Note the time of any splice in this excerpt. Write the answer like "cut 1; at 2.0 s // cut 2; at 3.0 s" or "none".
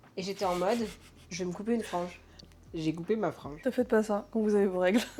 none